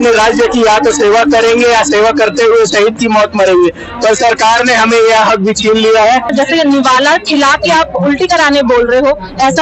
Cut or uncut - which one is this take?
cut